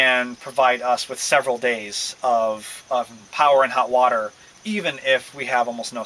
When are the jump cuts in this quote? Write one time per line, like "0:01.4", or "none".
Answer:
0:03.2